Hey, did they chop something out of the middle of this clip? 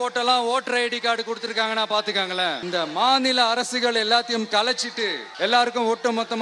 yes; 2 cuts; at 2.6 s, 5.2 s

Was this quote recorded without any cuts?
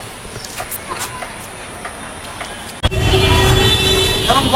no; 1 cut; at 2.8 s

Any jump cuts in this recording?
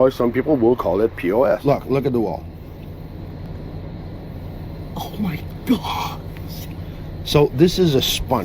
yes; 1 cut; at 1.6 s

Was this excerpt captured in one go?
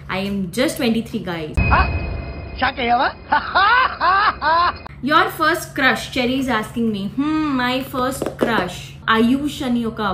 no; 3 cuts; at 1.5 s, 4.9 s, 9.0 s

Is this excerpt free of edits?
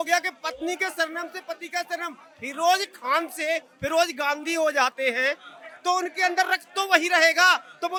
yes; 0 cuts

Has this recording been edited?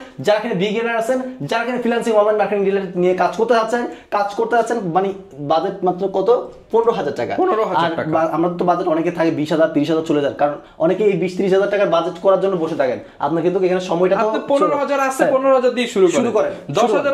no; 0 cuts

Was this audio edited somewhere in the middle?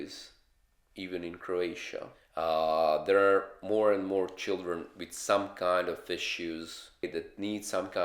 yes; 1 cut; at 7.0 s

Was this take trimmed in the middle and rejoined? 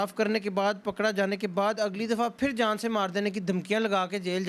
no; 0 cuts

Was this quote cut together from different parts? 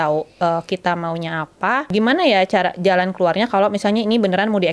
yes; 1 cut; at 1.9 s

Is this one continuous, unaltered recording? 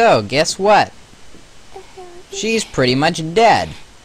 yes; 0 cuts

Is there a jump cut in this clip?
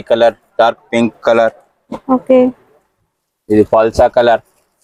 no; 0 cuts

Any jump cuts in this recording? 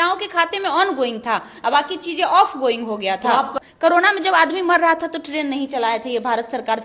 yes; 1 cut; at 3.5 s

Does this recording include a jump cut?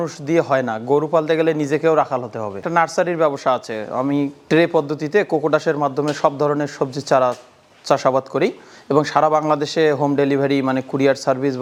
no; 0 cuts

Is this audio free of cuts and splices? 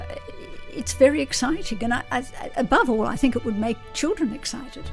yes; 0 cuts

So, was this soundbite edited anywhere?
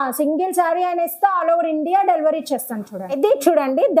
no; 0 cuts

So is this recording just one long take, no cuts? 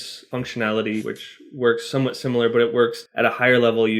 no; 2 cuts; at 1.1 s, 3.0 s

